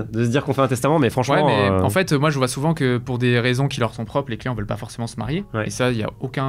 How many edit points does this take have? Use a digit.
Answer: 0